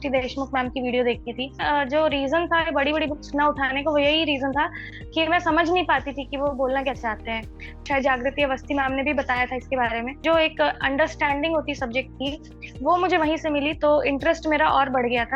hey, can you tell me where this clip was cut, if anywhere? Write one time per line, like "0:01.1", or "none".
0:01.6
0:07.8
0:10.2